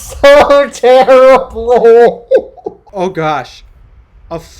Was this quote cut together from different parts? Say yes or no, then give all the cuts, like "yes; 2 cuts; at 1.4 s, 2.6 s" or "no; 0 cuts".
yes; 1 cut; at 2.9 s